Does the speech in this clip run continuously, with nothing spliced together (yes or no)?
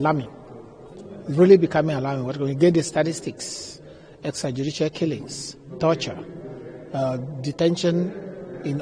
yes